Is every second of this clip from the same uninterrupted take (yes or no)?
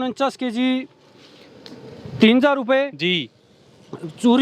yes